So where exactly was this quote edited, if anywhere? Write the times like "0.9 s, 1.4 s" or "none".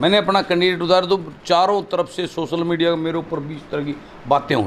none

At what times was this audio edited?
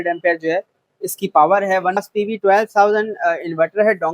2.0 s

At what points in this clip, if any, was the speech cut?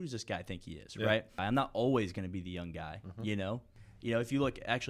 1.4 s, 3.7 s

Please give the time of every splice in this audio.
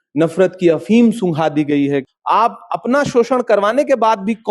2.1 s

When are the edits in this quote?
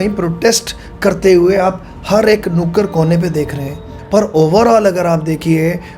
4.0 s

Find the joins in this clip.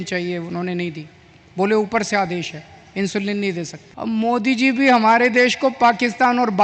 3.8 s

